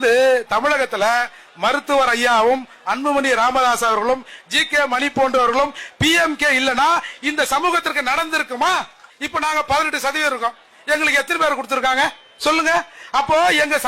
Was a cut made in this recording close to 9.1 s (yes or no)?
yes